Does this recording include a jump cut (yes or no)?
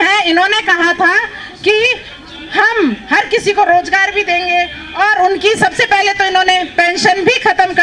no